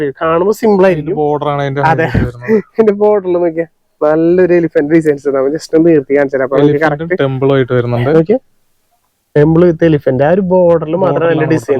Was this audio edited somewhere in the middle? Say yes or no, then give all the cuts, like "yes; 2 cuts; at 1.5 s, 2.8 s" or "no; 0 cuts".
no; 0 cuts